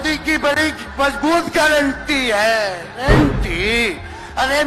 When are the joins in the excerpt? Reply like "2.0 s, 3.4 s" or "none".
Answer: 3.0 s